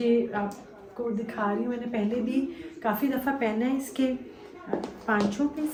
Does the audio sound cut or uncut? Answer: uncut